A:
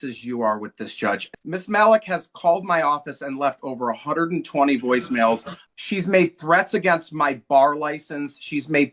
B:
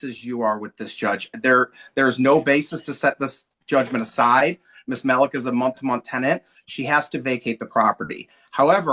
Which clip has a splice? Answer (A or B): A